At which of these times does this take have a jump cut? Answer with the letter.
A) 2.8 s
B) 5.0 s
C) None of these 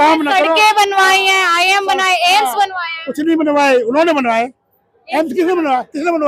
C